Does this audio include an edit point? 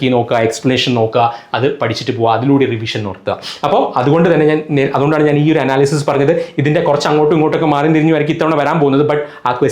no; 0 cuts

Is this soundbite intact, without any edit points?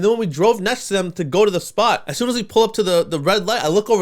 no; 1 cut; at 2.1 s

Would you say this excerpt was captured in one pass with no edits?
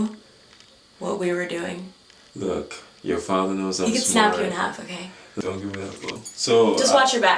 no; 2 cuts; at 5.2 s, 6.2 s

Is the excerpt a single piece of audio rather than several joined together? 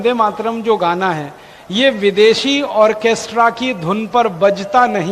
yes; 0 cuts

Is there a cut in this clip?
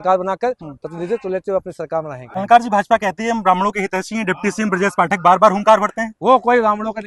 yes; 1 cut; at 2.3 s

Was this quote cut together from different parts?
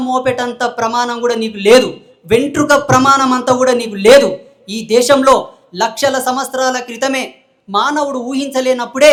no; 0 cuts

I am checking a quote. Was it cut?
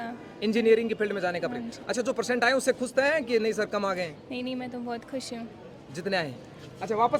no; 0 cuts

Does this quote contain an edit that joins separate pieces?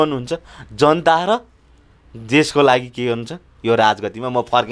no; 0 cuts

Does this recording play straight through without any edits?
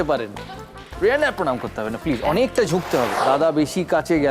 no; 1 cut; at 3.1 s

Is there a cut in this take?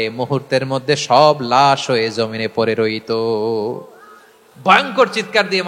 no; 0 cuts

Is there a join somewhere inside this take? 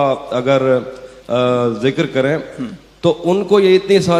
no; 0 cuts

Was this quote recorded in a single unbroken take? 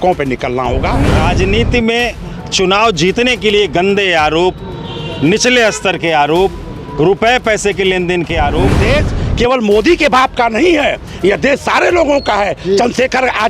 no; 2 cuts; at 1.0 s, 8.8 s

